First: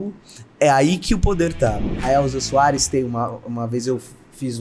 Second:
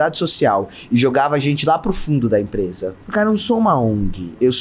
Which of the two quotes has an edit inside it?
first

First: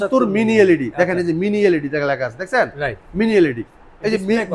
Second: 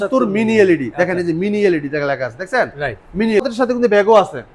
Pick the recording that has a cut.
second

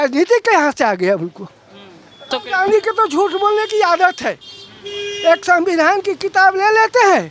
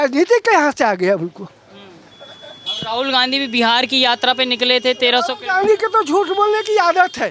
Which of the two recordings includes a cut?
first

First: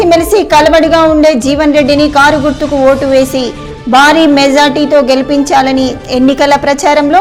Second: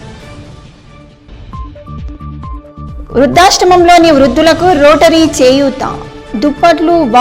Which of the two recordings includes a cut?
second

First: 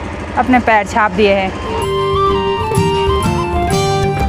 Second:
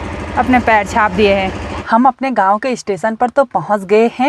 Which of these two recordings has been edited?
second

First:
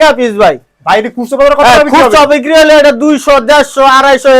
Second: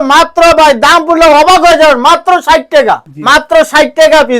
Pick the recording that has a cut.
second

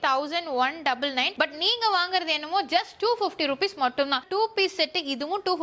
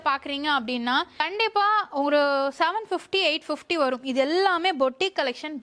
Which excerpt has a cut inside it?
first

